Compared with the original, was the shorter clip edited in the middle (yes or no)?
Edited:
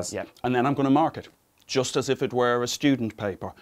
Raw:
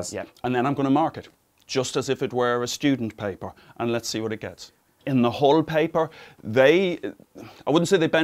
no